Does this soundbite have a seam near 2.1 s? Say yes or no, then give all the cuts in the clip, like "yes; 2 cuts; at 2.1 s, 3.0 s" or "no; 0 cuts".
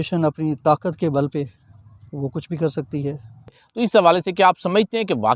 no; 1 cut; at 3.6 s